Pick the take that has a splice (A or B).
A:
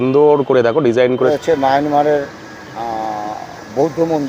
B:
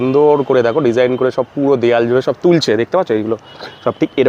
A